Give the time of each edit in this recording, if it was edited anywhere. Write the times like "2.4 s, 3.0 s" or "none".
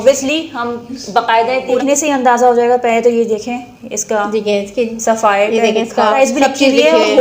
1.8 s, 6.2 s